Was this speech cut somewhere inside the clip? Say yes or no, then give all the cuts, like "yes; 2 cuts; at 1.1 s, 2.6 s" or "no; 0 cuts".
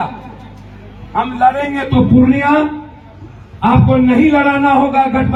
no; 0 cuts